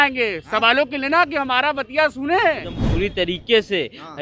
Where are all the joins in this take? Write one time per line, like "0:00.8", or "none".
0:02.8